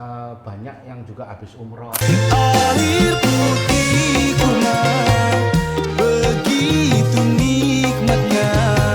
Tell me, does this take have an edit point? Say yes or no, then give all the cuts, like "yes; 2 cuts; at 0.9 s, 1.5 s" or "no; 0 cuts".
yes; 1 cut; at 1.9 s